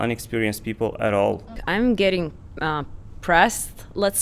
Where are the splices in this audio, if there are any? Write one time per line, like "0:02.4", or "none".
0:01.6